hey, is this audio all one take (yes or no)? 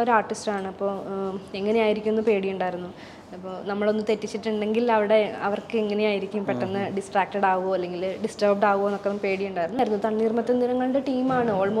no